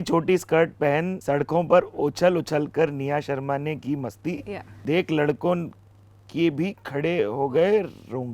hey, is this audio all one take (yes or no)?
no